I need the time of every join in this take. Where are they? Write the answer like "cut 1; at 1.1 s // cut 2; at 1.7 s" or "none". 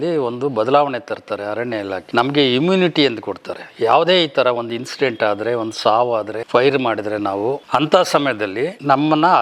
none